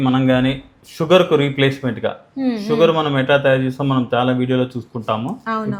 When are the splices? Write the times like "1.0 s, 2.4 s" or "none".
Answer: none